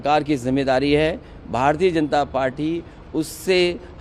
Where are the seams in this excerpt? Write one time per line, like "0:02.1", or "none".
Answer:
none